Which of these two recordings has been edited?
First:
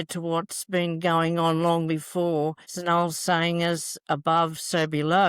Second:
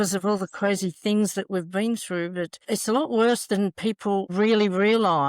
second; 1 cut; at 4.3 s

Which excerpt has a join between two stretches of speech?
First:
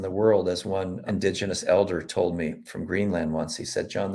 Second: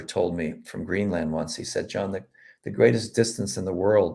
first; 1 cut; at 1.0 s

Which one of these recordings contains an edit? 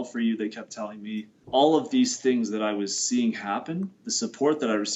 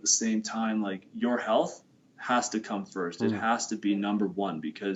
first; 1 cut; at 1.4 s

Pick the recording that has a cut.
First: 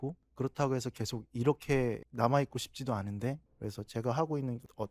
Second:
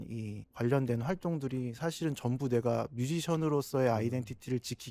first; 1 cut; at 3.5 s

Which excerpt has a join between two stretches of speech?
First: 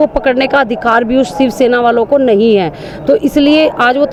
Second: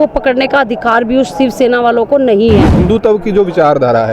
second; 1 cut; at 2.8 s

